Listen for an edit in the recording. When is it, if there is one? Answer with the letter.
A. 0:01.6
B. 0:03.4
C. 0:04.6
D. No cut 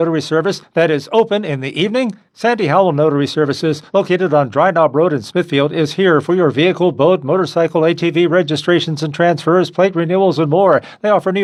D